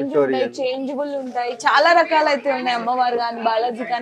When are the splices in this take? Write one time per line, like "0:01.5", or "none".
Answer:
none